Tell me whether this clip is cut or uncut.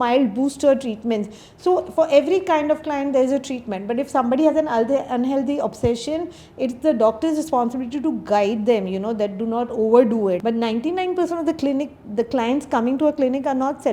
uncut